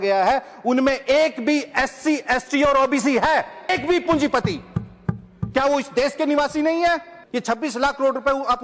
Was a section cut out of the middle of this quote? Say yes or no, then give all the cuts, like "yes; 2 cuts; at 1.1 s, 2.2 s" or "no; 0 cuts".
yes; 2 cuts; at 3.7 s, 7.2 s